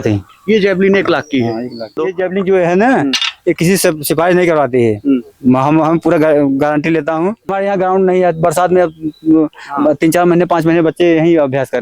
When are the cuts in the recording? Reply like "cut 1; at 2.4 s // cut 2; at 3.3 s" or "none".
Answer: cut 1; at 2.0 s // cut 2; at 7.5 s